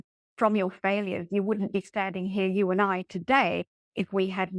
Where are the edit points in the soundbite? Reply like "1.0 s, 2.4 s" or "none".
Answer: none